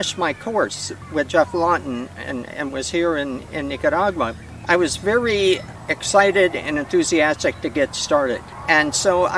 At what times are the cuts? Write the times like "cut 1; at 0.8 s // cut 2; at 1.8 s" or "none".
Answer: cut 1; at 1.0 s // cut 2; at 4.5 s // cut 3; at 5.7 s // cut 4; at 8.5 s